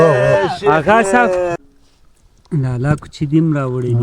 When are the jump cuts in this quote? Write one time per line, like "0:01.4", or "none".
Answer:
0:01.6